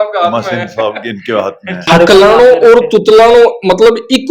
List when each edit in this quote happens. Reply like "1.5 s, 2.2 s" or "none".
1.8 s